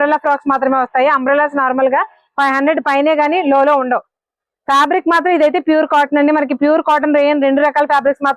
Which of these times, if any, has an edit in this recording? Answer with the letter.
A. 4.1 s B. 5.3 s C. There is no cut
A